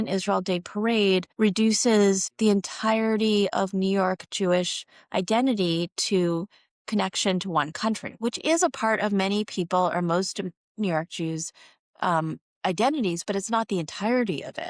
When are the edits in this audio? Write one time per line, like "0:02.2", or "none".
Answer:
0:01.3
0:02.3